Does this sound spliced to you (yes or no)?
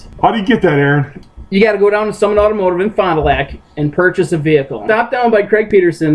yes